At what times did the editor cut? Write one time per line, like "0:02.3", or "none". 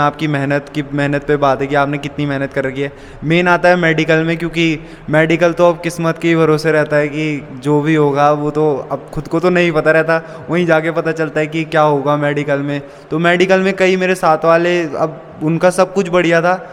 none